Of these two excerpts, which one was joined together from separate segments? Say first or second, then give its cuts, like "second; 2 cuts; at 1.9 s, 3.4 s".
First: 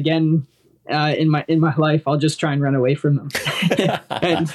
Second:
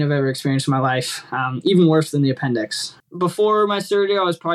second; 1 cut; at 2.9 s